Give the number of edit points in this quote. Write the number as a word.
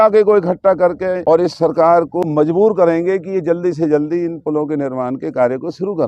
two